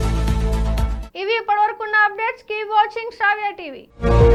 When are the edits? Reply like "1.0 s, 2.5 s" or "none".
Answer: none